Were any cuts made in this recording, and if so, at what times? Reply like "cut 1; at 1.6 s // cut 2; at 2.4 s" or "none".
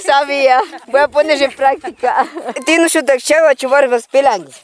none